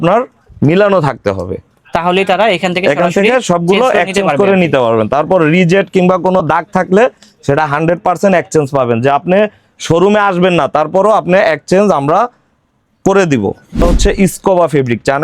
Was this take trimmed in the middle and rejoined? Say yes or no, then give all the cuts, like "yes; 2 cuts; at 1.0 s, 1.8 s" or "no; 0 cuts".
yes; 1 cut; at 13.8 s